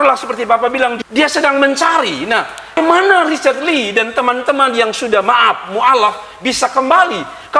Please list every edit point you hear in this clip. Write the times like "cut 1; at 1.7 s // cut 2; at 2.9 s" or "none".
cut 1; at 1.0 s // cut 2; at 2.7 s